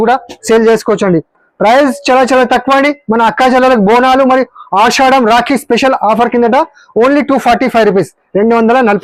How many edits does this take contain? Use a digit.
0